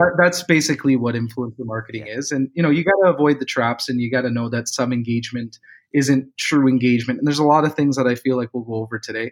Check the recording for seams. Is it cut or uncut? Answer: uncut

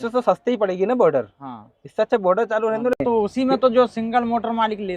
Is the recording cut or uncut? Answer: cut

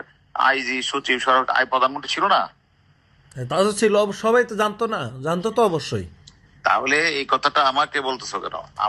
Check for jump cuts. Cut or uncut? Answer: uncut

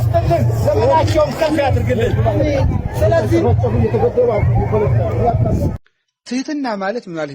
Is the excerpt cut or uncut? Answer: cut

